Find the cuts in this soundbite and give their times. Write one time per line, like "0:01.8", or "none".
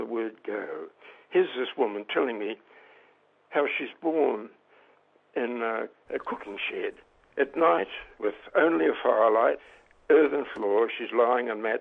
0:06.0
0:08.0
0:09.6